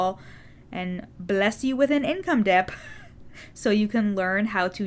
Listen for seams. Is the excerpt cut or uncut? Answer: uncut